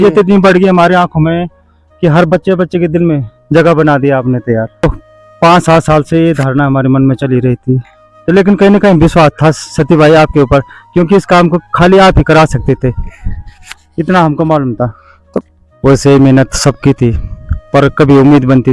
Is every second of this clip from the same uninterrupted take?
no; 2 cuts; at 4.8 s, 15.4 s

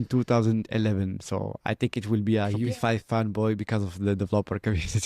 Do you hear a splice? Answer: yes; 1 cut; at 2.6 s

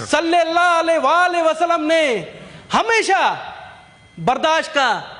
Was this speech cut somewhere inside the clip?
no; 0 cuts

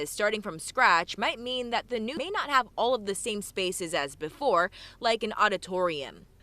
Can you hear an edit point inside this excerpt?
yes; 1 cut; at 2.1 s

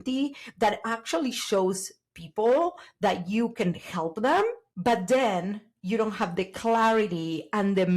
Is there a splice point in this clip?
yes; 1 cut; at 4.7 s

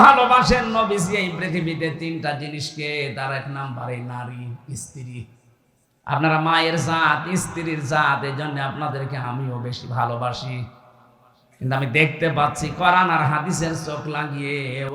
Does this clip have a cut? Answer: no; 0 cuts

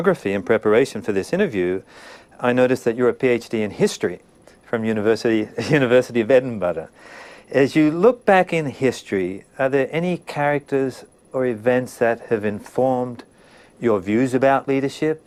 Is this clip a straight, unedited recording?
yes; 0 cuts

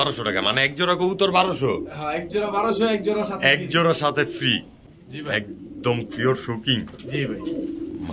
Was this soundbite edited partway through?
yes; 1 cut; at 4.8 s

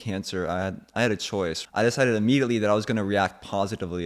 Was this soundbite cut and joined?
yes; 1 cut; at 1.6 s

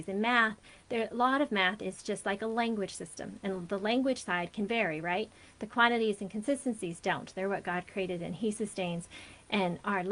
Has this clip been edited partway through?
no; 0 cuts

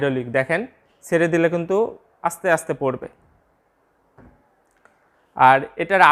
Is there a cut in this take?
no; 0 cuts

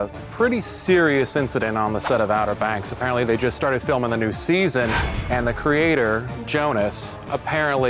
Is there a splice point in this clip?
no; 0 cuts

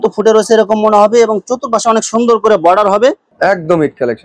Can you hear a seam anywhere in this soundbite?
yes; 1 cut; at 3.3 s

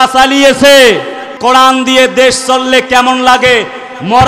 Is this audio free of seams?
no; 1 cut; at 1.4 s

